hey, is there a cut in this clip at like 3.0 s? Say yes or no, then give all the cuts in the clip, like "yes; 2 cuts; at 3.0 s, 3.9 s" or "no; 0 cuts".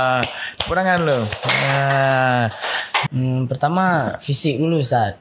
yes; 1 cut; at 3.0 s